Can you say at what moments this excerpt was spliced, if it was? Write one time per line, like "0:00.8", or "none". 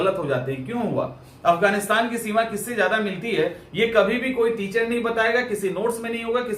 none

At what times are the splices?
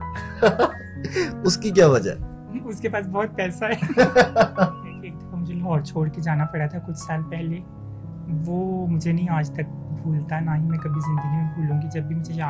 0:04.7

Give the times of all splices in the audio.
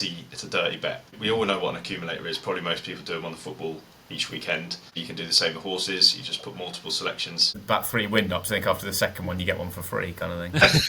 0:01.1
0:04.9
0:07.6

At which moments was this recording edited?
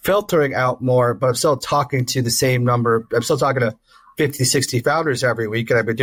none

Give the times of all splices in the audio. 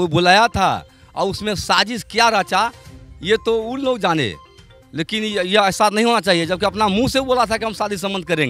none

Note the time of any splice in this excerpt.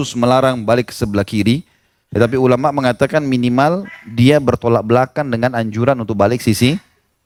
none

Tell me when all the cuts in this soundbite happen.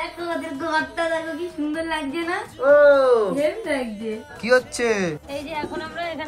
0:04.3
0:05.2

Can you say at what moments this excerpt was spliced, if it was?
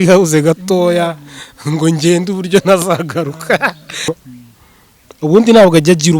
0:04.2

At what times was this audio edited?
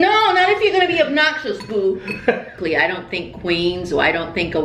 0:02.6

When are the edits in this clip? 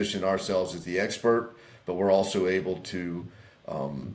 none

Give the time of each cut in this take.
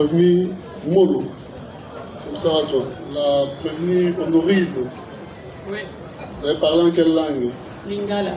0:03.0

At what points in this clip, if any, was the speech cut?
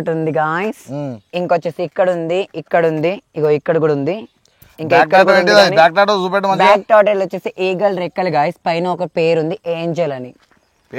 none

